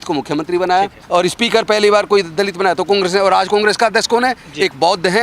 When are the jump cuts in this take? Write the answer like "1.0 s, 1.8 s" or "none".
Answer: 1.0 s